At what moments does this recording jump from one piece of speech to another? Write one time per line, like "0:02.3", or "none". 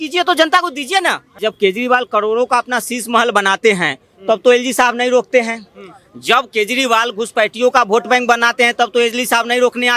0:01.3